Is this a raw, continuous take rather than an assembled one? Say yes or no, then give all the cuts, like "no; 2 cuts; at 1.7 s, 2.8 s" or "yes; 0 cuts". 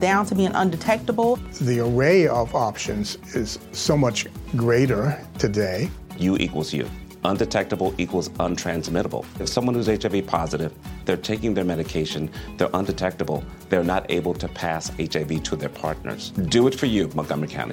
yes; 0 cuts